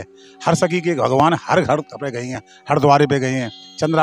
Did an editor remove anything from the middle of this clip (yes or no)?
no